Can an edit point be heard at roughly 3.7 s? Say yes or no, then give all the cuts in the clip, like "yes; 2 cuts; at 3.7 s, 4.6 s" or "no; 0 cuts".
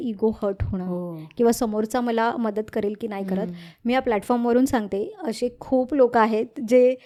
no; 0 cuts